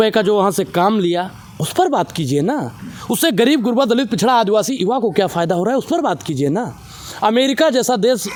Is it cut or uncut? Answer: uncut